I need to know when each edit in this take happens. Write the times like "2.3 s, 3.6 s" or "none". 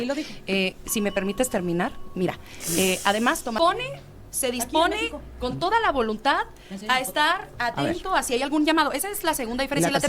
3.6 s